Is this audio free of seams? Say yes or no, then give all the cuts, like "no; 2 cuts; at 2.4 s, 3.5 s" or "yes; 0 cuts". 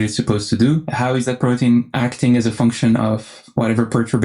no; 2 cuts; at 0.9 s, 1.9 s